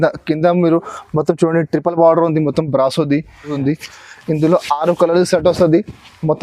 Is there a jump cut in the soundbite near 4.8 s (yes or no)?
no